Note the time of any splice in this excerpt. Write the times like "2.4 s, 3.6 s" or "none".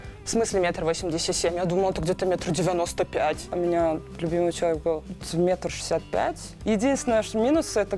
3.4 s